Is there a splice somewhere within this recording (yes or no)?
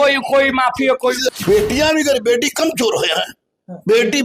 yes